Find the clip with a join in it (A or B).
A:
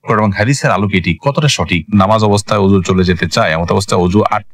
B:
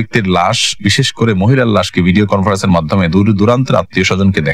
A